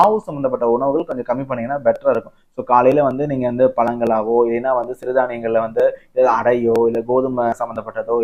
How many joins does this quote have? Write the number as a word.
zero